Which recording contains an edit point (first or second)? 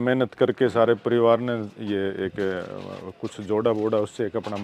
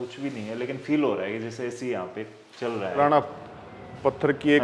second